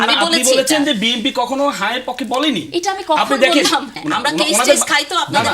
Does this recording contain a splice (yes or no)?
yes